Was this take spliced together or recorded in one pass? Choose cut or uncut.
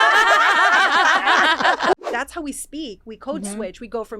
cut